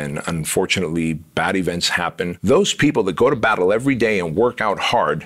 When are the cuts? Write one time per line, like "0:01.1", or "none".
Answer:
0:02.4